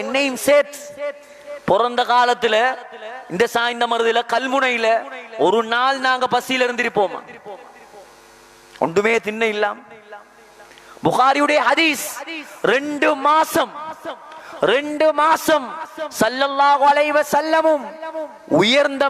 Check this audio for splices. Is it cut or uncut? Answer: uncut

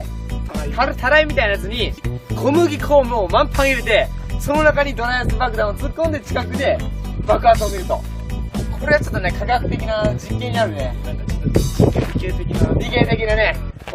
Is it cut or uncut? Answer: cut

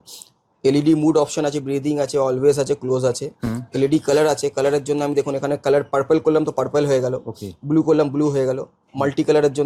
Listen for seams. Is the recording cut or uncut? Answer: uncut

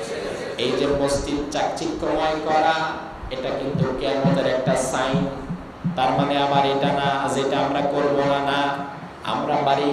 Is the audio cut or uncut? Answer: uncut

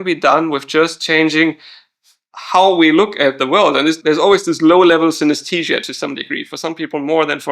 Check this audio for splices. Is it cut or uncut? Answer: cut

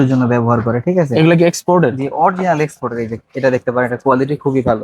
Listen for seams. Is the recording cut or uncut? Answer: uncut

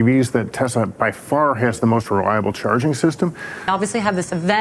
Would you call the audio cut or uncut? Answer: cut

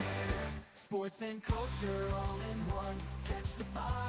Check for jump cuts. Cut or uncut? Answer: uncut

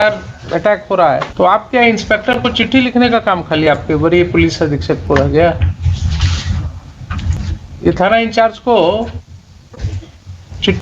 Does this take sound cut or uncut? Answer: cut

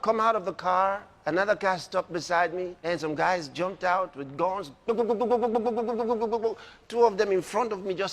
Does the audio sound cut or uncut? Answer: cut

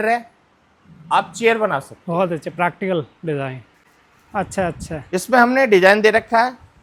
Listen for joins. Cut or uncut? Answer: uncut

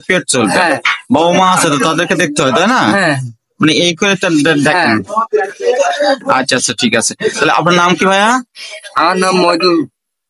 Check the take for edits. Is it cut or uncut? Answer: uncut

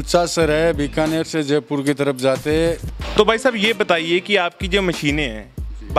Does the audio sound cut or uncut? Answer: cut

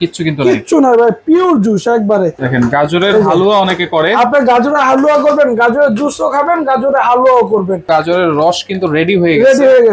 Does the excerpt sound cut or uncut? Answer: cut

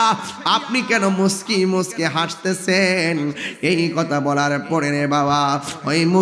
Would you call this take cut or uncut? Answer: uncut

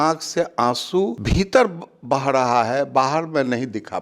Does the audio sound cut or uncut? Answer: cut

